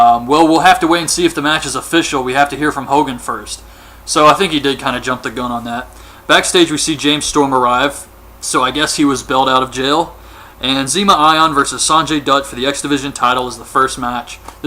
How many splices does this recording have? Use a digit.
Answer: 1